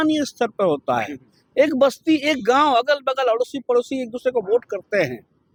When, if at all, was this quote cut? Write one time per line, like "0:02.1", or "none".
none

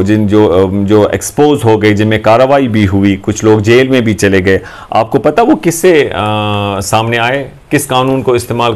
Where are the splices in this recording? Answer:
none

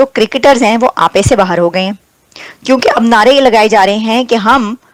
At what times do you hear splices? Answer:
none

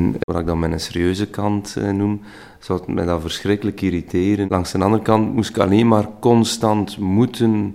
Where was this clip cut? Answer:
0:04.5

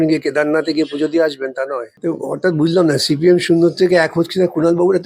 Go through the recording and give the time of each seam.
0:01.9

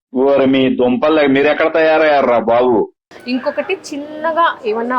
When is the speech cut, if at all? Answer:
0:03.1

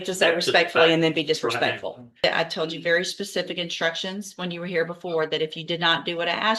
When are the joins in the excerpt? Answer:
0:02.2

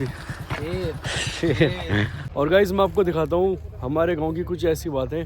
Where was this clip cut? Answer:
0:02.2

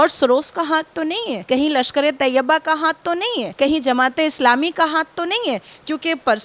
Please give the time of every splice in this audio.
0:01.4
0:03.5

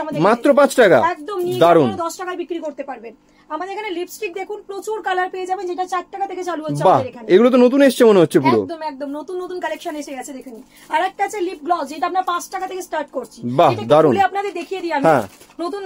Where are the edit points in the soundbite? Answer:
none

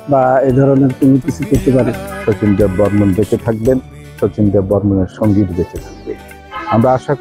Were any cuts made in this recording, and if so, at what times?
0:02.0

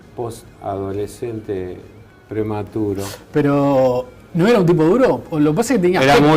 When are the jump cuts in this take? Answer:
0:03.0

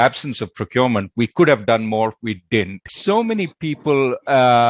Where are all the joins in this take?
0:02.9

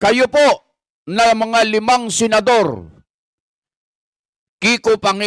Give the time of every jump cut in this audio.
none

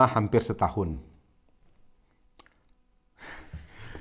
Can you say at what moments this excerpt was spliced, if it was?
none

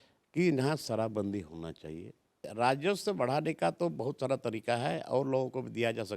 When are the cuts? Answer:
0:02.5

